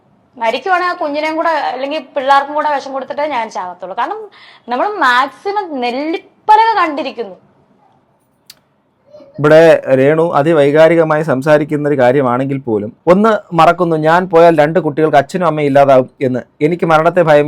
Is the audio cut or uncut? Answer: cut